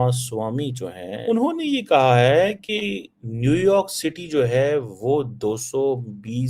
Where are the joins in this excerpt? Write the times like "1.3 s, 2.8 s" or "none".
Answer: 1.2 s